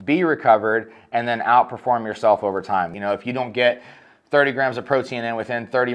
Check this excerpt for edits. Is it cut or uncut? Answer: cut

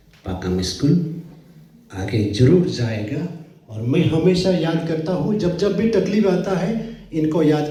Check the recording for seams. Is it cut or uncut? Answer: uncut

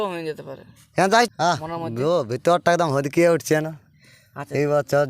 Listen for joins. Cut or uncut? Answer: cut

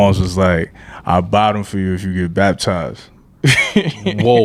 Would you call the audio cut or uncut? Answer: uncut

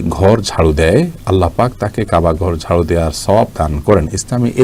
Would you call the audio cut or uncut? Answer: uncut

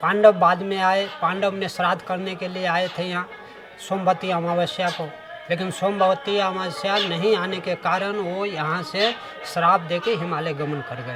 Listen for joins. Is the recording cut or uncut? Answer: uncut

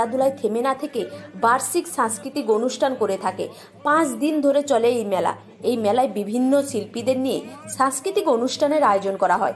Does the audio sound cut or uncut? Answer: uncut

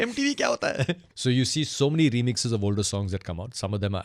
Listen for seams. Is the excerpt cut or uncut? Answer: cut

